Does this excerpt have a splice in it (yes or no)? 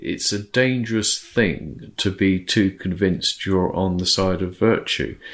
no